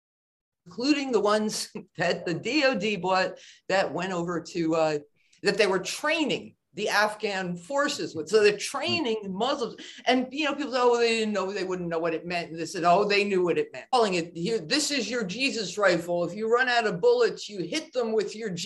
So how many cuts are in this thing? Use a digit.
1